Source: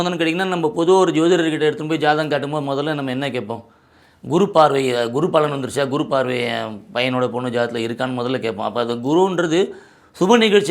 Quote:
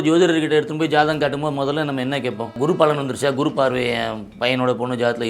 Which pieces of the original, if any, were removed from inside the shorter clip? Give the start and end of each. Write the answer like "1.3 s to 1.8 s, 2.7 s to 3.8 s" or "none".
3.7 s to 5.1 s